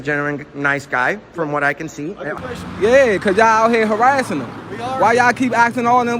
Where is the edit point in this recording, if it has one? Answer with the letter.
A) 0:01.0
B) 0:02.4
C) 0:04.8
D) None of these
B